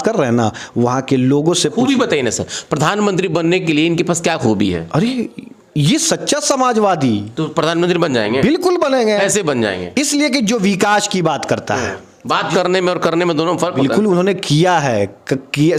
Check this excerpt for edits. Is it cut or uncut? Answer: uncut